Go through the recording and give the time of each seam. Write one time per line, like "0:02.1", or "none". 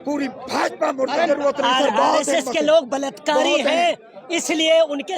0:01.3

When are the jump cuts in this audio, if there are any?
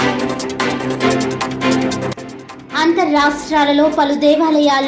0:02.1

